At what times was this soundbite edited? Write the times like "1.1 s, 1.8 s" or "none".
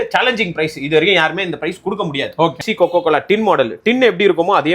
2.6 s